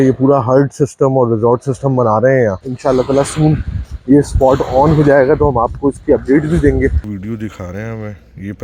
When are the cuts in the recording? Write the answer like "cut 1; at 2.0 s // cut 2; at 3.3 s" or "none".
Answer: cut 1; at 2.6 s // cut 2; at 7.0 s